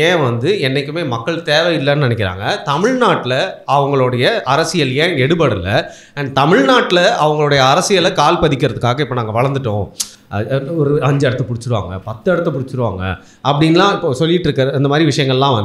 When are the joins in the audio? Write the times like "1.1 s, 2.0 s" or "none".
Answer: none